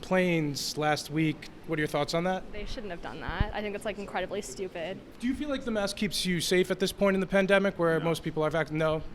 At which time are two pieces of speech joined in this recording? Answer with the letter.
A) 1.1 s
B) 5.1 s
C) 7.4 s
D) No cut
B